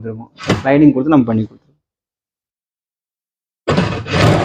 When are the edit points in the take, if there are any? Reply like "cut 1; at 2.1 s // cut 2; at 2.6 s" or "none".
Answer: none